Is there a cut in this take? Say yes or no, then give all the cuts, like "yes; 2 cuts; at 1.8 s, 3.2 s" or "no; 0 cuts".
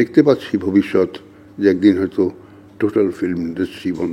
no; 0 cuts